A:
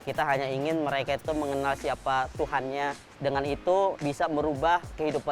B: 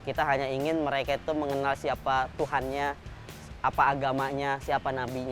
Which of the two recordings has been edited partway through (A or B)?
A